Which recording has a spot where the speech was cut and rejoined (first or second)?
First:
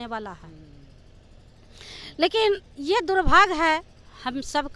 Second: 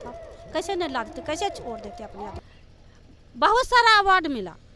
second